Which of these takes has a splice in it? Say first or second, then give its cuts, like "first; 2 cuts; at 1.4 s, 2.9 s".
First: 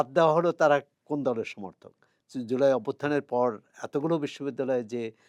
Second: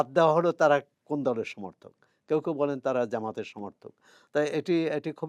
first; 1 cut; at 2.1 s